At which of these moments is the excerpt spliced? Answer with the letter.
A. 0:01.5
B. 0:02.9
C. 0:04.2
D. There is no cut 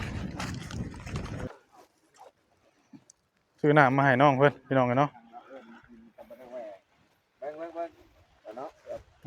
A